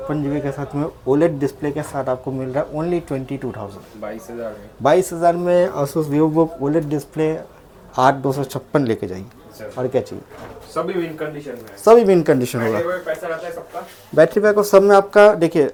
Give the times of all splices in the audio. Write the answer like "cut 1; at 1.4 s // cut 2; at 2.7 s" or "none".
none

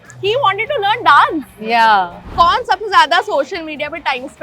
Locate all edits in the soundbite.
cut 1; at 2.3 s

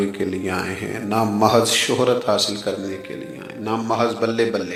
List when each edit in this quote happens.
none

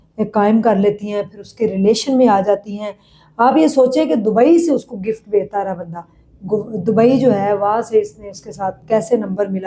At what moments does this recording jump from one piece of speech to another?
none

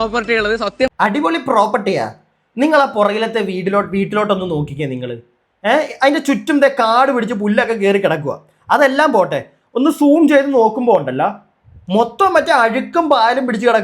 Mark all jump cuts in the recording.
cut 1; at 0.9 s

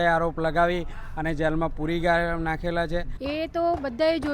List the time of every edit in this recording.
cut 1; at 3.1 s

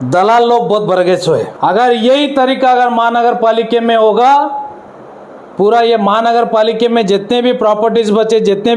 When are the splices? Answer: cut 1; at 1.5 s

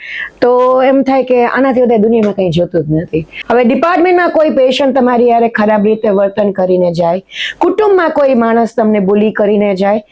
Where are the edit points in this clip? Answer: cut 1; at 3.3 s

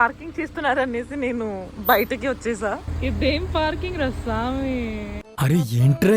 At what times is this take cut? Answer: cut 1; at 2.9 s // cut 2; at 5.3 s

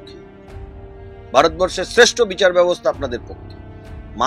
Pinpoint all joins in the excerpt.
none

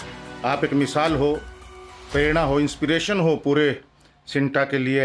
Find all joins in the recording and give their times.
none

